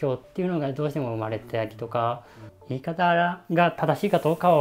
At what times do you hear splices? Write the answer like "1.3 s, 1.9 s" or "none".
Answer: 2.5 s